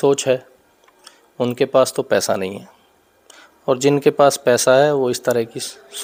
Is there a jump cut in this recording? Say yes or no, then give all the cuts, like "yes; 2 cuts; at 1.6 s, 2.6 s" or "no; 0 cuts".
no; 0 cuts